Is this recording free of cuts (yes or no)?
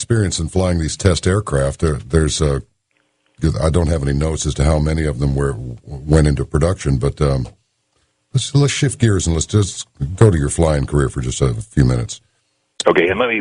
yes